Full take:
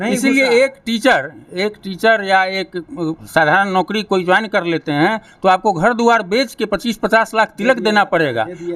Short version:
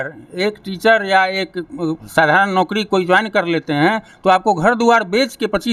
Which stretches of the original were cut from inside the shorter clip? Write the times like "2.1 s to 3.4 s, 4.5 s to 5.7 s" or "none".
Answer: none